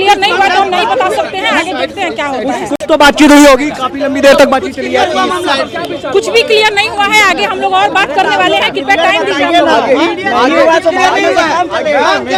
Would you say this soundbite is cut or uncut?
uncut